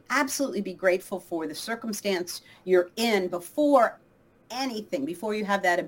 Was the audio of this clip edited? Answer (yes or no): no